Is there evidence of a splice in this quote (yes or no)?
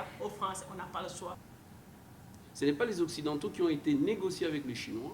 yes